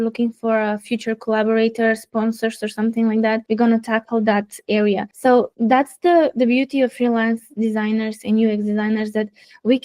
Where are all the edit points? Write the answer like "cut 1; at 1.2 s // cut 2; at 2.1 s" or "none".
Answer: cut 1; at 3.4 s // cut 2; at 5.3 s